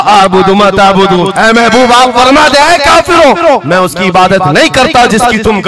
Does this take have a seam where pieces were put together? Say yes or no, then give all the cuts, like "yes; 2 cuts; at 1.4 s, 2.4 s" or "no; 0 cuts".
no; 0 cuts